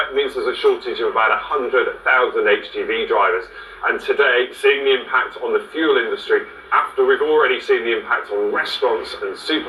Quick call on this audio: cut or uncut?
uncut